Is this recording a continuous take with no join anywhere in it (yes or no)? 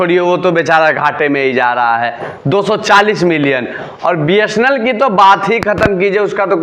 yes